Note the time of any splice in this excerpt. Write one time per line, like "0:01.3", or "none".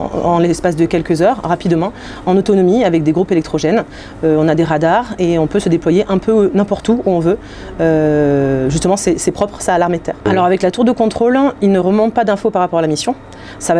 0:10.3